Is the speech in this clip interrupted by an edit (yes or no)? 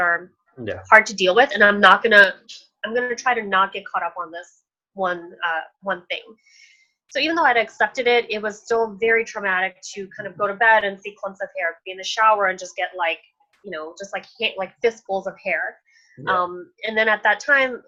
no